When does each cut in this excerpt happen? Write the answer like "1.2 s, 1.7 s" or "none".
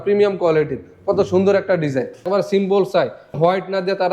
2.2 s, 3.4 s